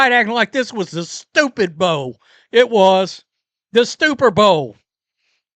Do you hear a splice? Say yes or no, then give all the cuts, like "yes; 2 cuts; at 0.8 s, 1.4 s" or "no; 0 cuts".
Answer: no; 0 cuts